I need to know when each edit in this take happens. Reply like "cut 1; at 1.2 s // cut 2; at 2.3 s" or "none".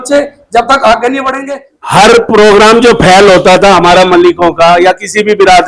cut 1; at 1.4 s